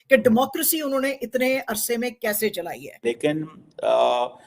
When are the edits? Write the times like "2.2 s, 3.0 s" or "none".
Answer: 2.9 s